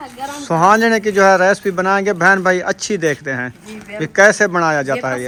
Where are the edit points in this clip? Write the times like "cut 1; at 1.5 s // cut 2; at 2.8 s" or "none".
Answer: none